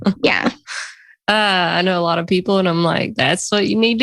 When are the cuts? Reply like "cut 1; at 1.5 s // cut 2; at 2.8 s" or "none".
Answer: none